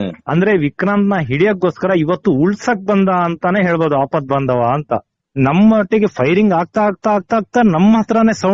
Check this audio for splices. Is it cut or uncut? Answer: cut